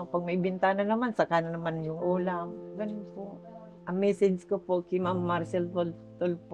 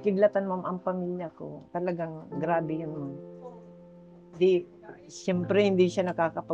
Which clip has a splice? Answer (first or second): first